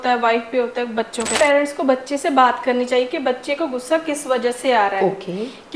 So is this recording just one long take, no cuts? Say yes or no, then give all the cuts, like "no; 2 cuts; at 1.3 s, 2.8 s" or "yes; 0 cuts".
no; 1 cut; at 1.3 s